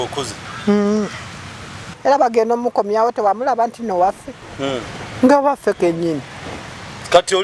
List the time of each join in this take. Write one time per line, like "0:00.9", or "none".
0:01.9